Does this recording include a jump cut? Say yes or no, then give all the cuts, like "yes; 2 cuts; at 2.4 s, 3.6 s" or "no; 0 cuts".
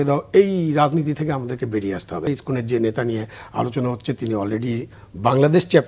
yes; 1 cut; at 2.3 s